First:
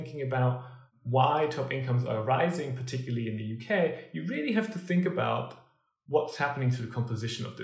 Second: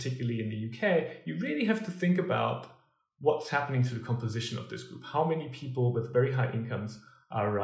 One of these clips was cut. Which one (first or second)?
first